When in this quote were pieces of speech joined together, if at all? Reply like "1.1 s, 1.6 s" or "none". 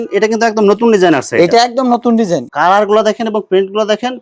2.5 s